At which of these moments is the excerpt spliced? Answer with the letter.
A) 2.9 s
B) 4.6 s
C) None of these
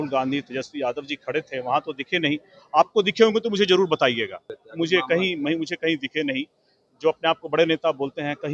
B